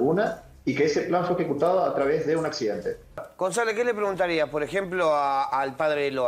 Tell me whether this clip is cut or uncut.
cut